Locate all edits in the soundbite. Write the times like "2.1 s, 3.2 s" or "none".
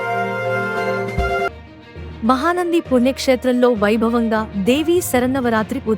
1.5 s